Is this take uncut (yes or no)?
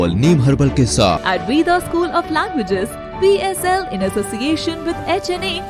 no